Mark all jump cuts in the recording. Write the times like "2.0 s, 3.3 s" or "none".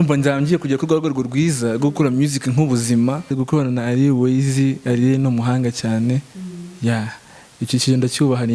3.3 s